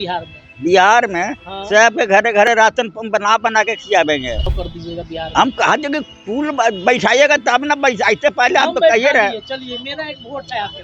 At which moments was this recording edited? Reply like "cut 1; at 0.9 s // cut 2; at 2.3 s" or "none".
cut 1; at 4.5 s